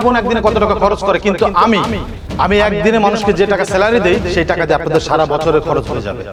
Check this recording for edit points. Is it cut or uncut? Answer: uncut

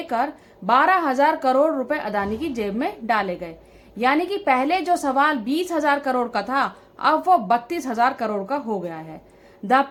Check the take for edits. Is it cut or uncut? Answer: uncut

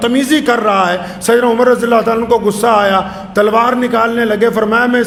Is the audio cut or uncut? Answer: uncut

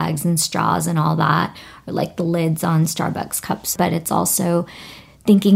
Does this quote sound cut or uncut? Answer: cut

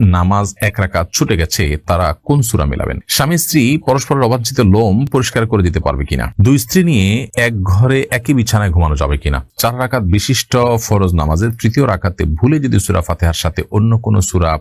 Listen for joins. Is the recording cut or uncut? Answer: cut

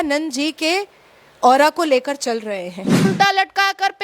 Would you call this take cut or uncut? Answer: cut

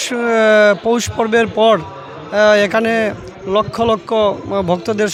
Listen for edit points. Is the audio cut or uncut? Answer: uncut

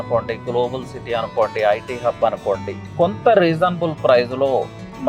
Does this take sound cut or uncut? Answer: cut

